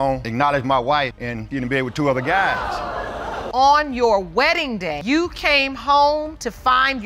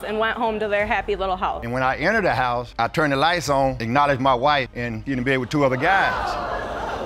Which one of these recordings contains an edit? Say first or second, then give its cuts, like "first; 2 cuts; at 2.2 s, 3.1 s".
second; 1 cut; at 1.6 s